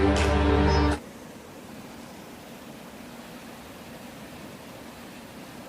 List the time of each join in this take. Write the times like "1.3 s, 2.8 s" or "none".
0.9 s